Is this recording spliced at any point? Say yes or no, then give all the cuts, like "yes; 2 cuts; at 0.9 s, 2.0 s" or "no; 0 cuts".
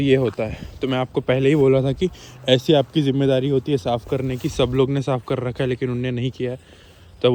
no; 0 cuts